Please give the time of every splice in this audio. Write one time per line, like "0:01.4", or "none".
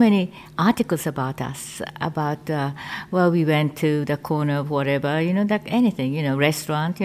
none